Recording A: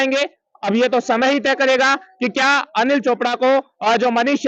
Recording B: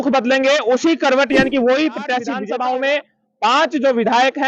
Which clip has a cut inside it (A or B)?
B